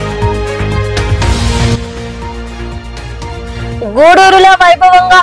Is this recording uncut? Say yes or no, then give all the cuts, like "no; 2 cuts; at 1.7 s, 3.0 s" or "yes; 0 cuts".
no; 1 cut; at 1.0 s